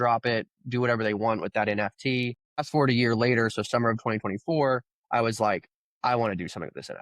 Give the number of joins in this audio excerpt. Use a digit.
1